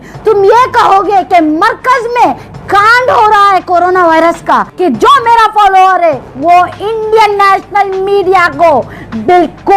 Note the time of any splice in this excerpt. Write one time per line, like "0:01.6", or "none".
0:04.7